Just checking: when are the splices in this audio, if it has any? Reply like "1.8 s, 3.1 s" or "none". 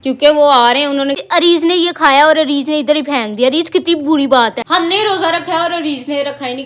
none